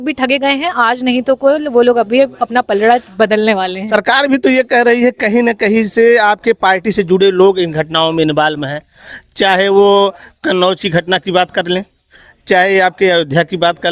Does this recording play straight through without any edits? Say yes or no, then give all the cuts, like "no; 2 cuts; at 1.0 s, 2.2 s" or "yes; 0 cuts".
no; 1 cut; at 3.9 s